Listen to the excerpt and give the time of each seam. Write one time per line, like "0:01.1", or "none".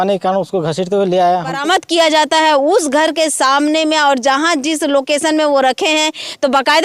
0:01.6

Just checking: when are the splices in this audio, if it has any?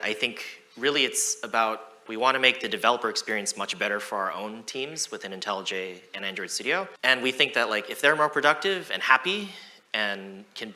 0:02.0
0:06.9

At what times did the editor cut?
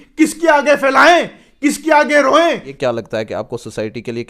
0:02.7

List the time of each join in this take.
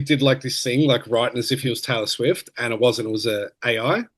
none

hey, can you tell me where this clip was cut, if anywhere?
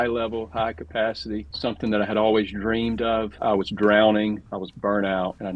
0:03.3

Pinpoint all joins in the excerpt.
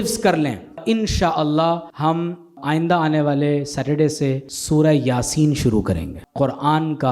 0:00.8
0:02.4
0:04.5
0:06.2

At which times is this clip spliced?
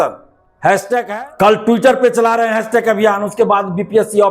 0:01.1

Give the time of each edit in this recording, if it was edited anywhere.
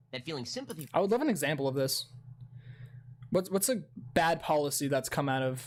none

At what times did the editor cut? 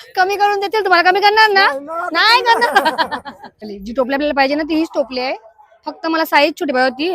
0:03.7

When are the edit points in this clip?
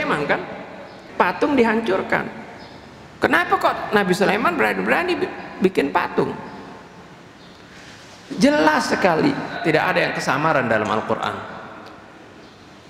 0:01.0
0:09.5

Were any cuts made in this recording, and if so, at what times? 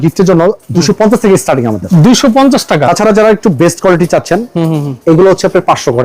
0:02.8

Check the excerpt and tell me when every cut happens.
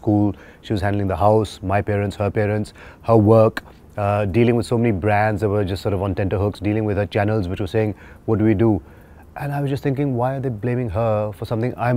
none

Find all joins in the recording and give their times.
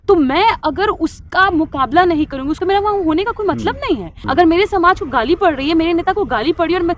0:02.5
0:04.2

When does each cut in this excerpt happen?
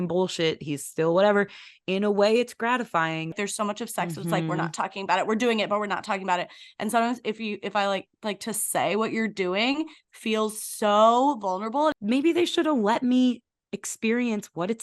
0:03.4
0:12.0

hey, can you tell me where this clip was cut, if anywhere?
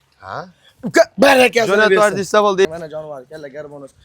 0:02.7

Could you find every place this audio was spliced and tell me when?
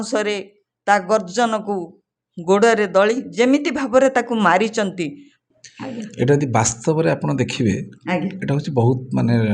0:05.4

